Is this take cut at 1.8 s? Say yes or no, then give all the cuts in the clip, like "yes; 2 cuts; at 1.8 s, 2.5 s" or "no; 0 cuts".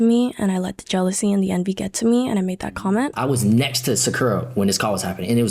no; 1 cut; at 3.1 s